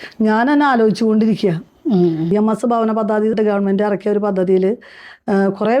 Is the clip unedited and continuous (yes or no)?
no